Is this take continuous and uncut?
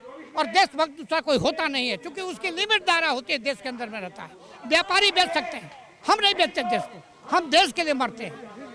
yes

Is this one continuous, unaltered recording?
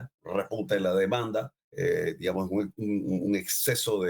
no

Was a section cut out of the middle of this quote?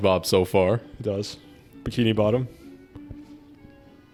no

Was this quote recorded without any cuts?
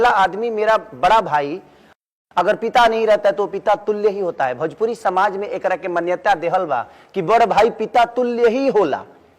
yes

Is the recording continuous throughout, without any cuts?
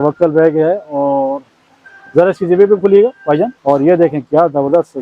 no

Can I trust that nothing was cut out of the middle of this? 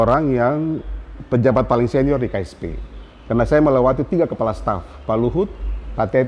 yes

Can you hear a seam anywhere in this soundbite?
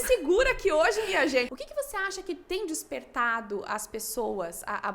yes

